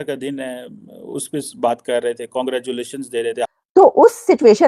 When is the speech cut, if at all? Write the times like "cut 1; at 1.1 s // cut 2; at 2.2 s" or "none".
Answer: cut 1; at 3.5 s